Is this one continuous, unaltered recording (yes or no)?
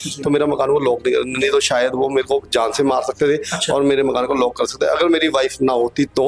yes